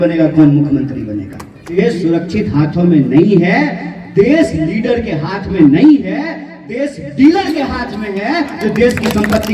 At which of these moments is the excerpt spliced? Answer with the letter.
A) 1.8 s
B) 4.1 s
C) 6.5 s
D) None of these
A